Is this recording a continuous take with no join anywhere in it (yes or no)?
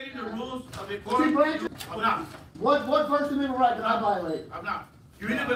no